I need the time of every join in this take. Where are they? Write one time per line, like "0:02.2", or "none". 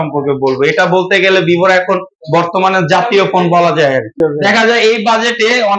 0:04.1